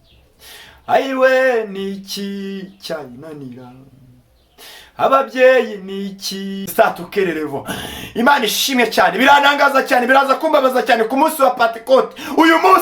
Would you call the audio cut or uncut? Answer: cut